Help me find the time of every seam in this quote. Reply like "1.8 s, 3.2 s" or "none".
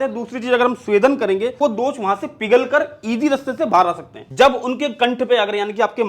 1.6 s, 4.3 s